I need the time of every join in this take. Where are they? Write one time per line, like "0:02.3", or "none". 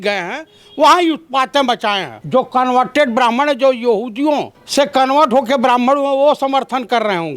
0:02.1
0:04.6